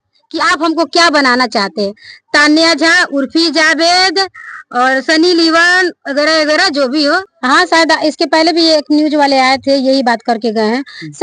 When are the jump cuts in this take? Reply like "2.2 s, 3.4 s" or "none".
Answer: 7.3 s

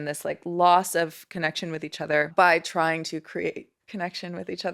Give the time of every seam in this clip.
2.3 s

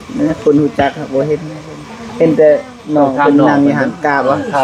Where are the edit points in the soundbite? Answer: none

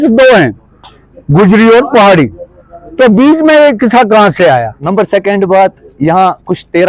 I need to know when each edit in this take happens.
4.8 s

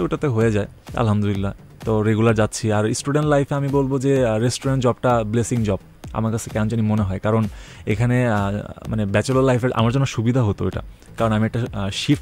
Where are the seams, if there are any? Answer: none

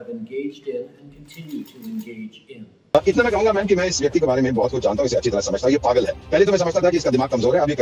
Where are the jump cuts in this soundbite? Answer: 2.7 s

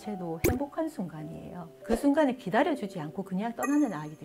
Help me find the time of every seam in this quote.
none

